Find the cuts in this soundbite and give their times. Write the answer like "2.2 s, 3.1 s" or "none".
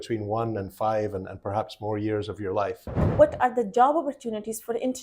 3.0 s